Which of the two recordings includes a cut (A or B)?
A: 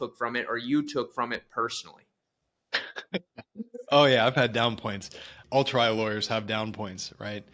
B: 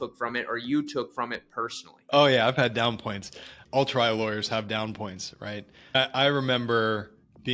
B